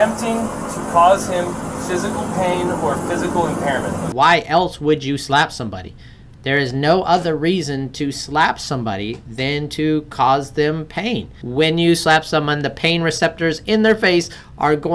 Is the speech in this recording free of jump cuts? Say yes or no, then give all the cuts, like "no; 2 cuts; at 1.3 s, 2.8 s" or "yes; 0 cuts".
no; 2 cuts; at 4.1 s, 11.3 s